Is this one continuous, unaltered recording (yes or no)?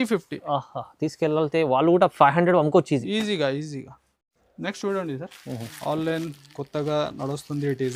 yes